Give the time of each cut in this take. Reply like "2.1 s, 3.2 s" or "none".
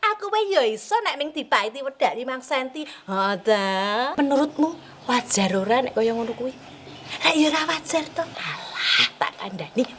4.1 s, 8.4 s